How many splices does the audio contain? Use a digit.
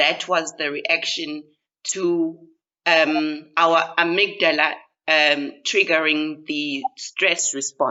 0